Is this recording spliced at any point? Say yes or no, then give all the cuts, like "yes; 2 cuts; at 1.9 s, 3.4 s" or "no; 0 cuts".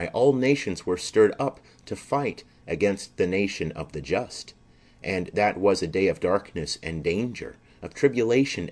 no; 0 cuts